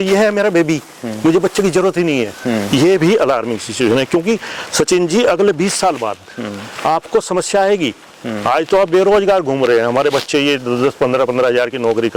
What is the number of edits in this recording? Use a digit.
0